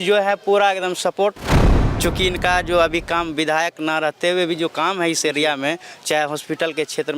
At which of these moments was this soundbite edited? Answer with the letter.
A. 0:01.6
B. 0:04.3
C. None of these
A